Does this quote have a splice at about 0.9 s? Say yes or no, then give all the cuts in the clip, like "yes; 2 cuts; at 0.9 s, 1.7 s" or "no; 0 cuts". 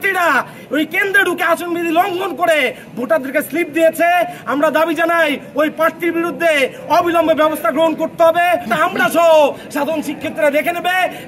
no; 1 cut; at 8.7 s